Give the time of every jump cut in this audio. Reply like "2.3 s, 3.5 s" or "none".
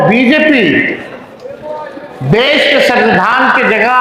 none